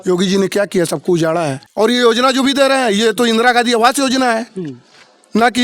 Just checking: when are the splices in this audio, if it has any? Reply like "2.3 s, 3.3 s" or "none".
1.6 s